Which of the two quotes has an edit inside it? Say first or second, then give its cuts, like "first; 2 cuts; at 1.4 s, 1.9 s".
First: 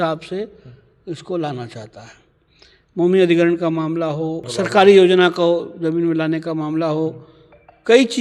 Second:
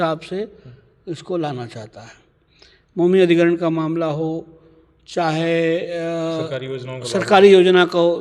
first; 1 cut; at 4.4 s